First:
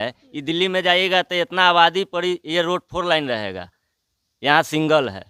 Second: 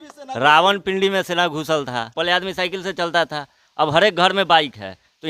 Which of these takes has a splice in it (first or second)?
second